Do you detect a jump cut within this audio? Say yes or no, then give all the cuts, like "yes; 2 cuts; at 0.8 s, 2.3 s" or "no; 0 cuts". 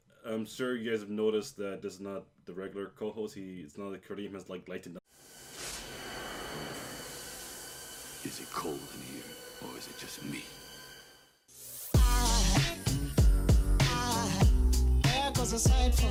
no; 0 cuts